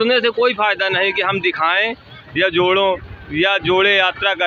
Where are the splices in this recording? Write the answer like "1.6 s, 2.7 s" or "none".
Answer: none